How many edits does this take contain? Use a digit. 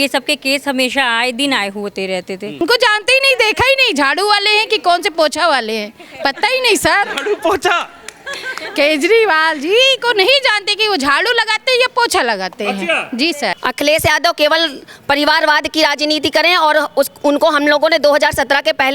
2